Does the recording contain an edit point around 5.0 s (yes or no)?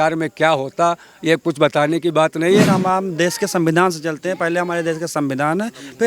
no